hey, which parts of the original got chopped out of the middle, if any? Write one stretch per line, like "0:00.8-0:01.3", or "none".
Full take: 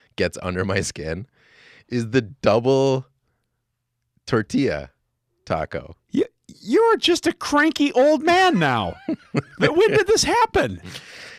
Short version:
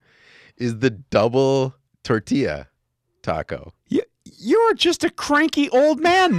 0:03.2-0:04.1